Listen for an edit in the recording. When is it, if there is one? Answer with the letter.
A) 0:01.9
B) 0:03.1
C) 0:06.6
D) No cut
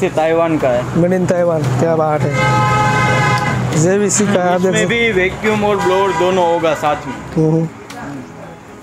D